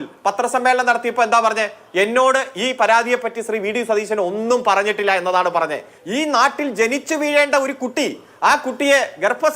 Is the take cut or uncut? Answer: cut